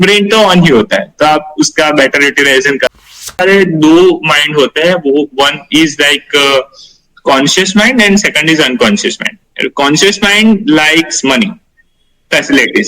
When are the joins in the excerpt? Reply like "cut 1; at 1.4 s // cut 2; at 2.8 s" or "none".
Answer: cut 1; at 3.2 s